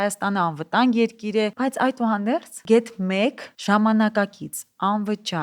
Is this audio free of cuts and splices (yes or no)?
no